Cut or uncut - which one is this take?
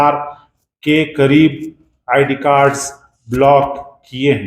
uncut